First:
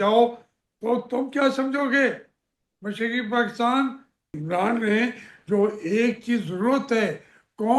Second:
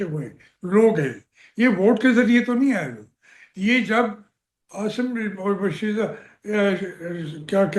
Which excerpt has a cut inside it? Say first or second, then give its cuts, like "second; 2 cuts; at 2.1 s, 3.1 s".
first; 1 cut; at 4.4 s